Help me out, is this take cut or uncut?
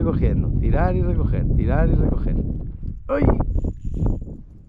cut